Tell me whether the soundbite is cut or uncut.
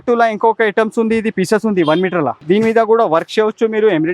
cut